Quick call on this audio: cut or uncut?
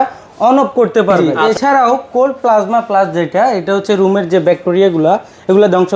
cut